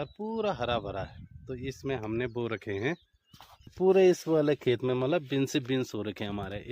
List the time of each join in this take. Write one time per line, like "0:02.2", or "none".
0:03.7